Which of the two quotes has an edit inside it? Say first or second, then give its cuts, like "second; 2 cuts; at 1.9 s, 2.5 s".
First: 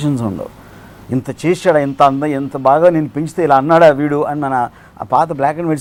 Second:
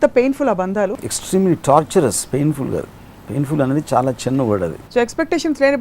second; 2 cuts; at 1.0 s, 4.8 s